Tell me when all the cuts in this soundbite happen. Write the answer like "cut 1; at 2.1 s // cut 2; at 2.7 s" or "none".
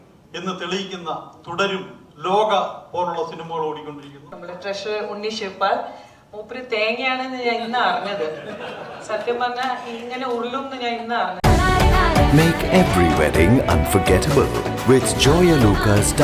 cut 1; at 4.3 s // cut 2; at 11.4 s